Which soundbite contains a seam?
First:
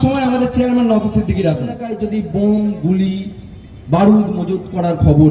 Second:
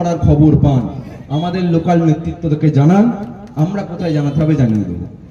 first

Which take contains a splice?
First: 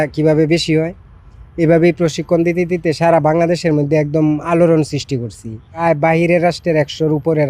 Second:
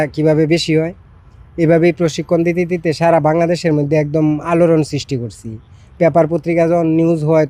first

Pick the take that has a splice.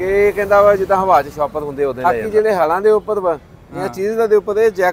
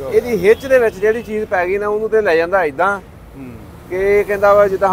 first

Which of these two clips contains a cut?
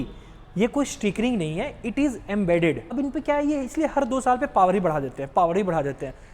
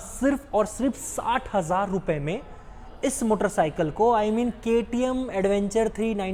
first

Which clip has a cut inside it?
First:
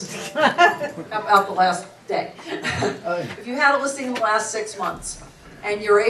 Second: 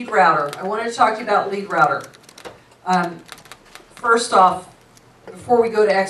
first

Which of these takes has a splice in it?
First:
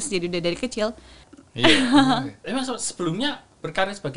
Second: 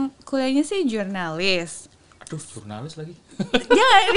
first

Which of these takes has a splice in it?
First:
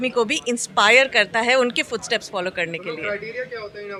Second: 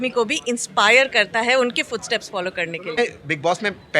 second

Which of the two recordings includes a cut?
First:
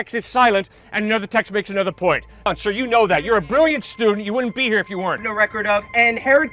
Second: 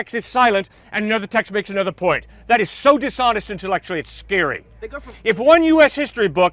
first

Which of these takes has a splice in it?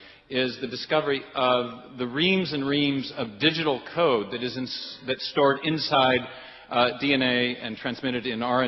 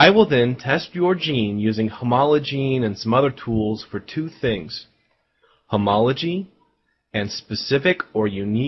second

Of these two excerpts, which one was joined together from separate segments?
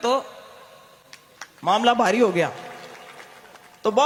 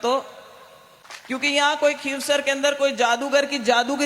second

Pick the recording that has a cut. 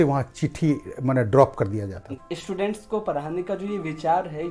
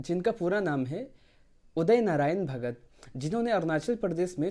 first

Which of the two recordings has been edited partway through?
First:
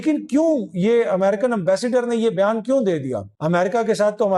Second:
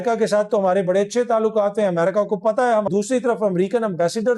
second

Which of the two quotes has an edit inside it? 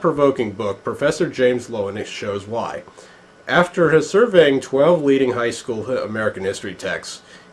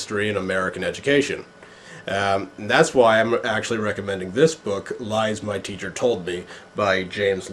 first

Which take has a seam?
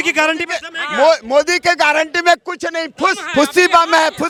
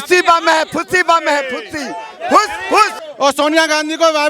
second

